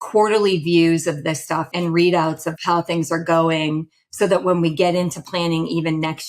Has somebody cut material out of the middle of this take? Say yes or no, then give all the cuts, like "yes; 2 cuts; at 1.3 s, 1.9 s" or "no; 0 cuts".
yes; 2 cuts; at 1.7 s, 2.6 s